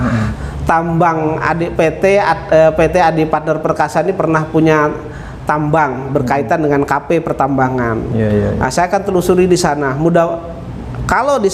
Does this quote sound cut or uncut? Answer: uncut